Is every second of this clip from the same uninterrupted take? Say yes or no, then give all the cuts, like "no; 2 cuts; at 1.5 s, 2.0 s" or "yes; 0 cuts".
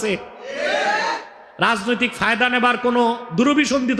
yes; 0 cuts